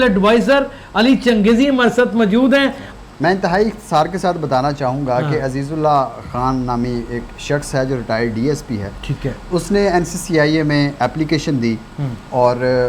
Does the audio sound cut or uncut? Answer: cut